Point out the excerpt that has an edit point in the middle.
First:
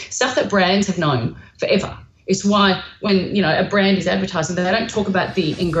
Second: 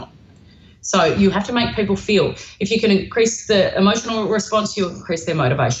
second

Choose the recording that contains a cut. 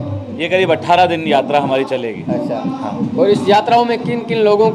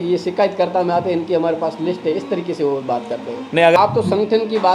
second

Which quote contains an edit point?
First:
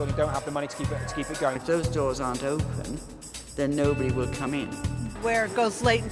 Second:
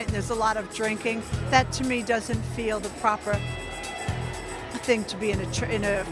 first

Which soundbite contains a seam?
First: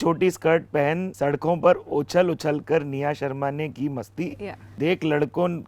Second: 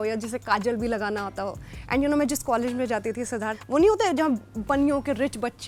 first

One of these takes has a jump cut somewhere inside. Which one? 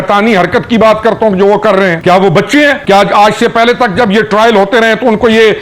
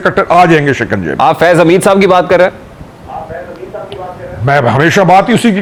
first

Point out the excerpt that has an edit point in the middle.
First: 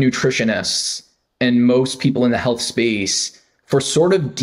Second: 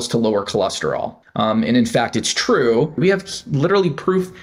second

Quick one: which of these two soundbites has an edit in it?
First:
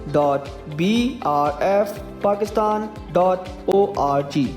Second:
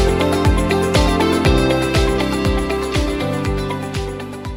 first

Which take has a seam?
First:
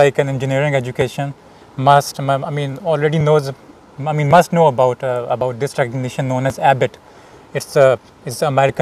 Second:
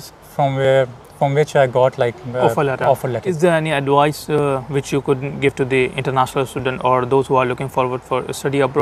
second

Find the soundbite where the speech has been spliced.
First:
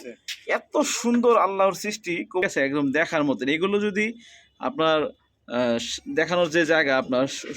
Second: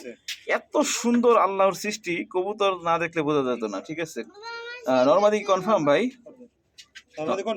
first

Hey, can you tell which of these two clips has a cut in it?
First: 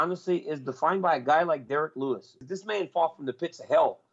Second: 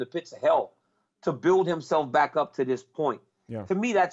first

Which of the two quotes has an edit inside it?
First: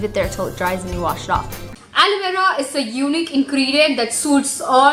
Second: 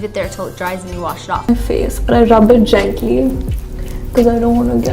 second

